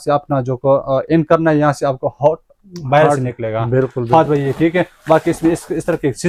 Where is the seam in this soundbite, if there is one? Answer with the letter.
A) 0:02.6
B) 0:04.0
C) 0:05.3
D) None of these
D